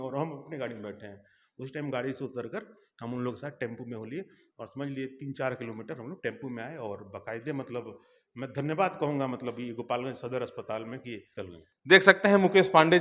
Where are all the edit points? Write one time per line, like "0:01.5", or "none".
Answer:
0:11.3

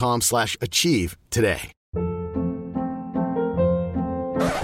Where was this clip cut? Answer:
0:01.7

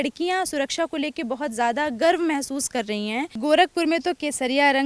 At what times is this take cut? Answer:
0:03.3

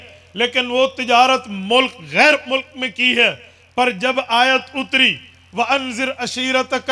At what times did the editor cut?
none

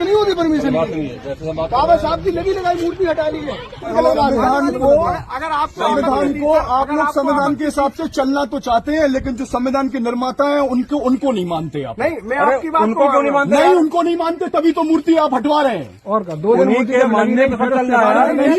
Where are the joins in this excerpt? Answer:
0:03.9

